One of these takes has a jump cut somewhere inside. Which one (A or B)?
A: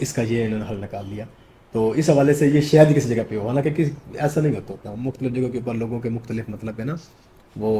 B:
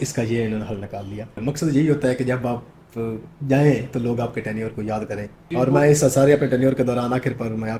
B